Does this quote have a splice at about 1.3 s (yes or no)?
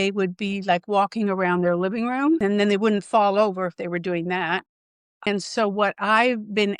no